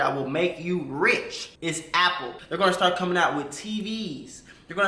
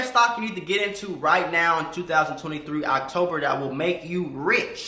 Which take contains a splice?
first; 1 cut; at 2.3 s

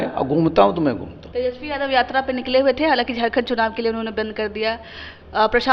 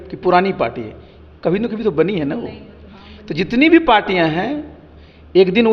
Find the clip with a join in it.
first; 1 cut; at 1.2 s

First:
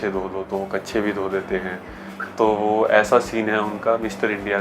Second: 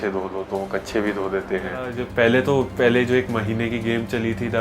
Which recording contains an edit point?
second; 1 cut; at 2.0 s

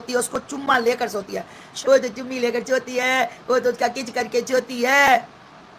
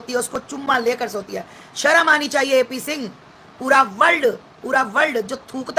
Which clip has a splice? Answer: first; 1 cut; at 1.7 s

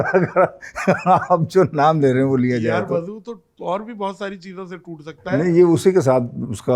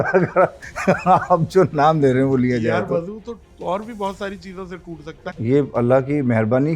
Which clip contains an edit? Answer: second; 1 cut; at 5.2 s

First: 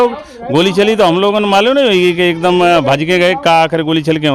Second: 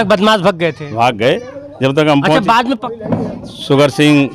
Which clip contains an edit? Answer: second; 1 cut; at 2.8 s

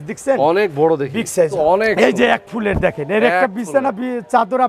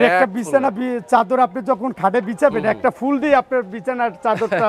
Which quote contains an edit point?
first; 1 cut; at 1.5 s

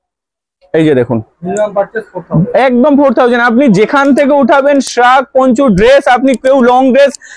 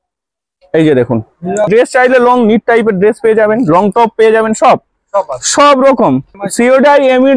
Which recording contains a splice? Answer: second; 2 cuts; at 1.7 s, 6.4 s

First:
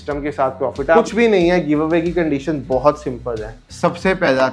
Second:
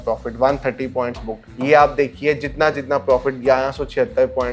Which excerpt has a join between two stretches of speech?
first; 2 cuts; at 1.0 s, 3.6 s

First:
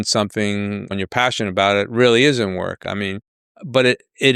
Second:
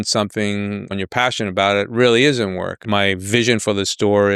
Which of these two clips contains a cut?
second; 1 cut; at 2.8 s

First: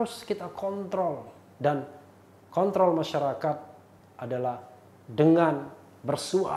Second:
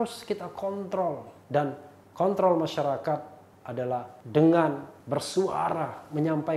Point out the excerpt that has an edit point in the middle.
second; 3 cuts; at 1.5 s, 3.8 s, 4.9 s

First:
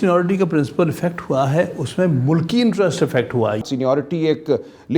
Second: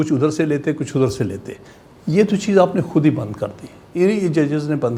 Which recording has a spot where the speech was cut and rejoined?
first; 1 cut; at 3.6 s

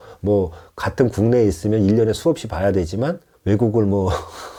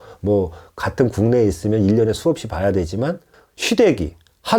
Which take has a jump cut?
second; 1 cut; at 3.3 s

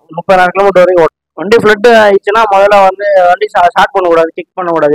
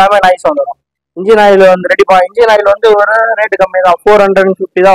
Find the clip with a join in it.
first; 1 cut; at 1.3 s

